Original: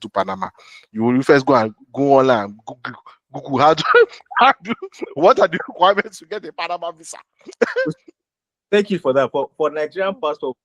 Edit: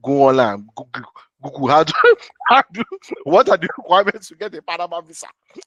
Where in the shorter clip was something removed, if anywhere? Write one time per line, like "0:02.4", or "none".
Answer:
none